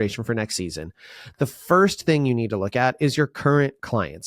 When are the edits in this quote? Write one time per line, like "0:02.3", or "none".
none